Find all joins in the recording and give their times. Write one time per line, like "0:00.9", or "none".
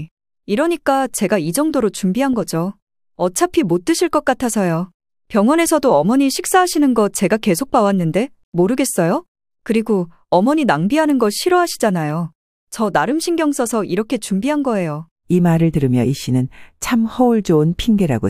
none